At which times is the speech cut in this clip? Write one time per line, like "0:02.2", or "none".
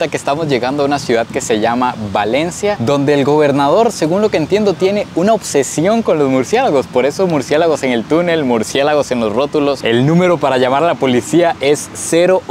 none